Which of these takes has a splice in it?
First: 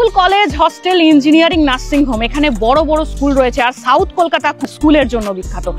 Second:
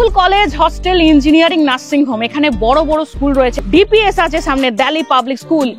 second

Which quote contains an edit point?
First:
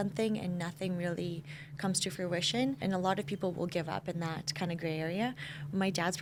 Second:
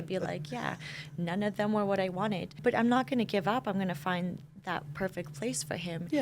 second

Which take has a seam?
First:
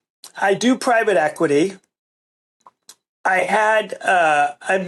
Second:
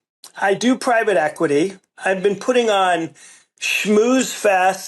second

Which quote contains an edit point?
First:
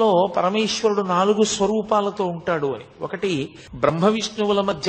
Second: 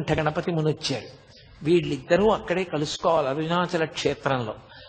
first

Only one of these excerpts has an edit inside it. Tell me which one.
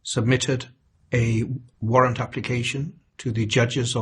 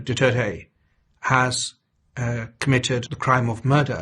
second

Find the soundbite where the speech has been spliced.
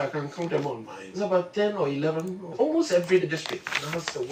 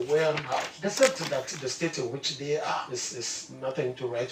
first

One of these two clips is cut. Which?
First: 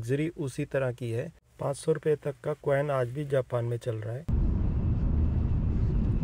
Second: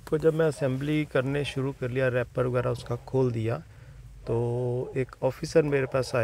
first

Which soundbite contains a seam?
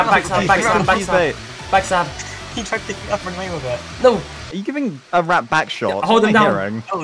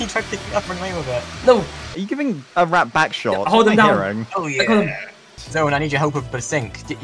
second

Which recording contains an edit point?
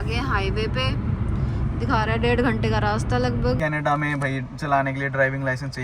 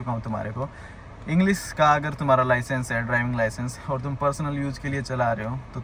first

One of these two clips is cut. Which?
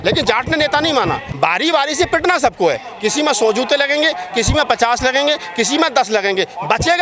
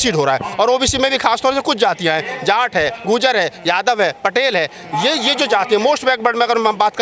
first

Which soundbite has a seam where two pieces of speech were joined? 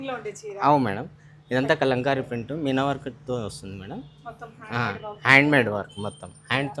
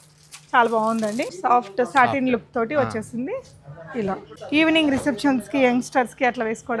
second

